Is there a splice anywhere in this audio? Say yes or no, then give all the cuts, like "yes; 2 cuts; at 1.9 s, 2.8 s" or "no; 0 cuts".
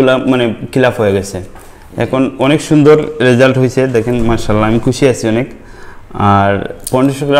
no; 0 cuts